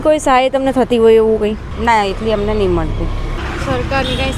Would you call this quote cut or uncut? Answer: cut